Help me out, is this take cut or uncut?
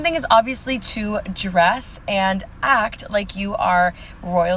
uncut